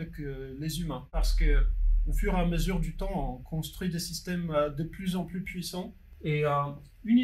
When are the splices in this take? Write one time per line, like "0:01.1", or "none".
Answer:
0:01.2
0:06.0